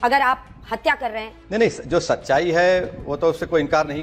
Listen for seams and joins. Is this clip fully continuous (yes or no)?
no